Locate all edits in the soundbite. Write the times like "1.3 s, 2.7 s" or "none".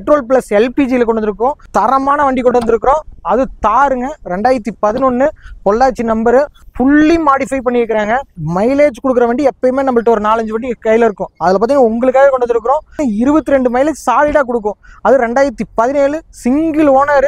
1.6 s, 6.6 s, 8.4 s